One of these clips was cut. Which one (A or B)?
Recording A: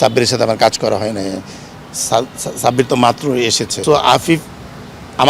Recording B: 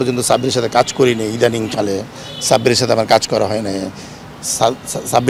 A